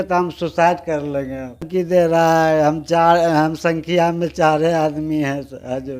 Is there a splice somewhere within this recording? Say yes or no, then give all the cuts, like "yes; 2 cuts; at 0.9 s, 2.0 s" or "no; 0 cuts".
yes; 1 cut; at 1.7 s